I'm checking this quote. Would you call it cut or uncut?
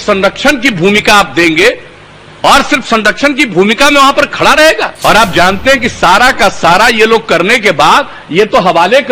cut